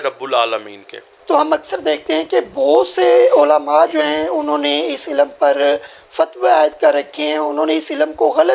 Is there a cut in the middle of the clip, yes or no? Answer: no